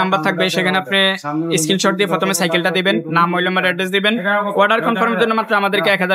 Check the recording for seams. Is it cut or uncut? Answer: uncut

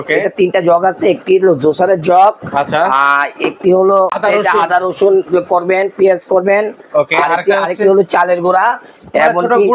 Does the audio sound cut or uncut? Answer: cut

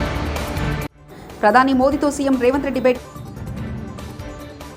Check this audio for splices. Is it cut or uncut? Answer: uncut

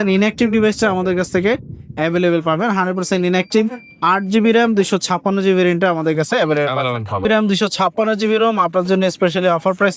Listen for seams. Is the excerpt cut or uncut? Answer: uncut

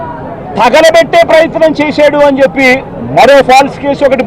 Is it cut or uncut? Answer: cut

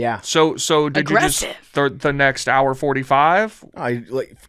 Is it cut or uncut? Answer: uncut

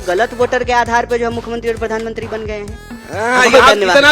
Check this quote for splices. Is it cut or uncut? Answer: cut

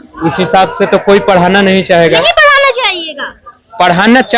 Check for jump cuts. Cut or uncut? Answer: uncut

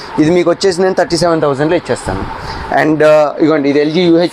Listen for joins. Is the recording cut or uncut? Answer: uncut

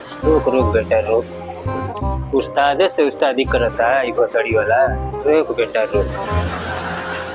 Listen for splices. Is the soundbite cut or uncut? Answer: uncut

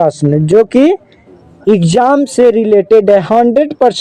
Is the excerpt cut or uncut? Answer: uncut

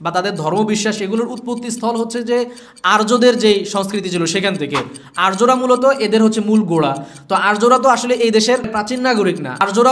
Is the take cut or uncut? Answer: cut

